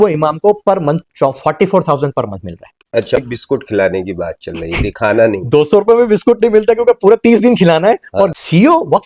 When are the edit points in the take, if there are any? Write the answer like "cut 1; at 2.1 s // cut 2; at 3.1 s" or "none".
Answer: cut 1; at 3.2 s // cut 2; at 8.3 s